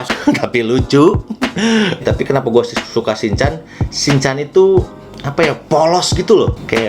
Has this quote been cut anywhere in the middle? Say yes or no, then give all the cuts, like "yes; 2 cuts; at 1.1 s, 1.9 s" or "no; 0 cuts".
yes; 1 cut; at 2.0 s